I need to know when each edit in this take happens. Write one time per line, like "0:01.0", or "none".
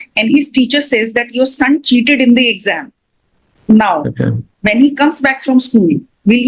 none

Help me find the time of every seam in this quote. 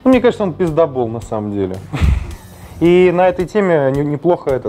none

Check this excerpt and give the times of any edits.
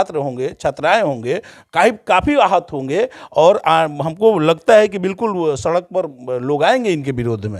none

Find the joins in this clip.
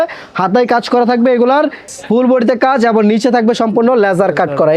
0:01.9

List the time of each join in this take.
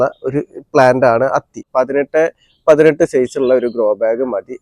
0:01.6

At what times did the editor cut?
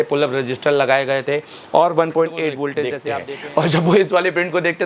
0:02.9

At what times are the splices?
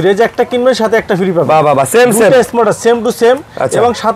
none

